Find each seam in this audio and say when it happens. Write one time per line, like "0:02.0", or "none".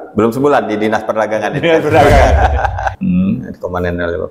0:02.8